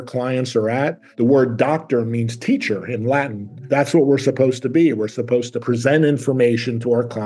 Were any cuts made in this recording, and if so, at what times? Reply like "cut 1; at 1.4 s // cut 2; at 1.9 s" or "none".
cut 1; at 1.0 s // cut 2; at 3.6 s // cut 3; at 5.6 s